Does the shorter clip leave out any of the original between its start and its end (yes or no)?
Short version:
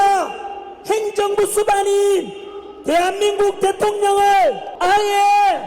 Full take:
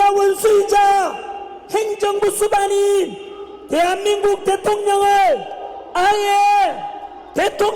yes